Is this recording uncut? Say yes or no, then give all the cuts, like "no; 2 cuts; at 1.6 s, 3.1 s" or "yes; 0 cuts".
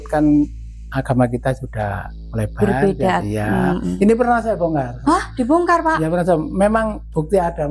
no; 2 cuts; at 3.9 s, 4.9 s